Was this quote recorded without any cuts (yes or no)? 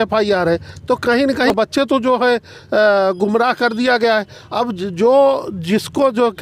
no